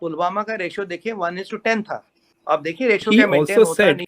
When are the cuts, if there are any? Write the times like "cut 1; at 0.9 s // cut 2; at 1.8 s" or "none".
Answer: cut 1; at 3.0 s